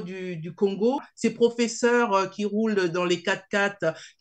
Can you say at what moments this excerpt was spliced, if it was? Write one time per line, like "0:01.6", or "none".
0:01.0

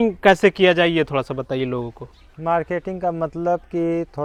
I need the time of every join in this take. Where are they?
none

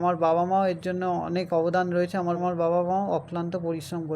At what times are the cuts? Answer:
0:02.4

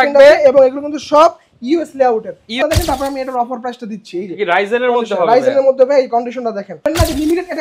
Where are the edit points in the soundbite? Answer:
0:02.5
0:06.8

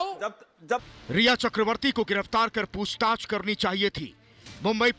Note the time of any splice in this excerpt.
0:01.0

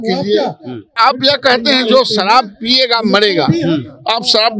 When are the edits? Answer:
0:01.0

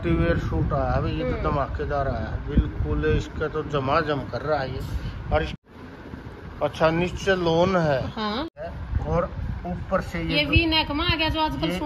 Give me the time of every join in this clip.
0:05.6
0:08.5

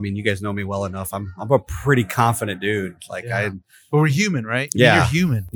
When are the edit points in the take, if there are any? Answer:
0:03.7

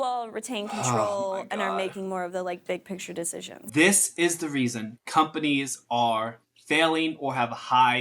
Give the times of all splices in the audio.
0:03.6

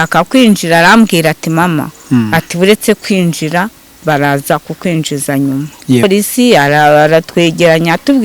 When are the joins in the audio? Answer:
0:06.0

